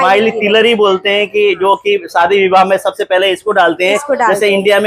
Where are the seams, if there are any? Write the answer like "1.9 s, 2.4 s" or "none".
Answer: none